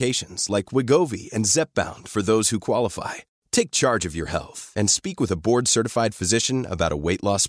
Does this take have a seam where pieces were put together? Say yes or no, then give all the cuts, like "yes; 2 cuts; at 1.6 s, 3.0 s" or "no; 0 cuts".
no; 0 cuts